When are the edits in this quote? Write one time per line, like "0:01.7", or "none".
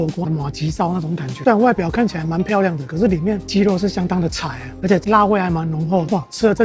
0:01.4
0:04.7